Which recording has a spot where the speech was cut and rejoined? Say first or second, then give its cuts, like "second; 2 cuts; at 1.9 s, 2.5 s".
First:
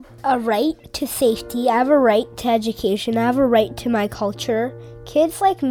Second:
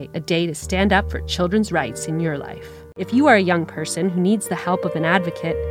second; 1 cut; at 3.0 s